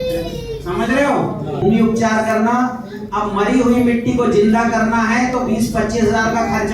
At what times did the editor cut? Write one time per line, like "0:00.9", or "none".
0:01.6